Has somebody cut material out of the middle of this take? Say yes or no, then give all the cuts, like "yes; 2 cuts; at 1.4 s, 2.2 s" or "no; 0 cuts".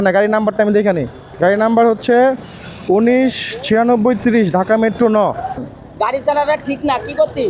yes; 2 cuts; at 1.2 s, 5.7 s